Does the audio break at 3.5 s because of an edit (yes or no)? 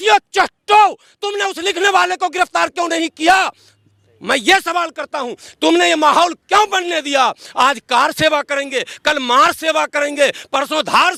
no